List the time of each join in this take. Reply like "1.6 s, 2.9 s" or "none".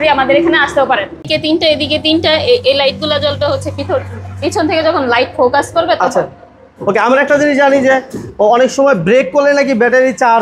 1.3 s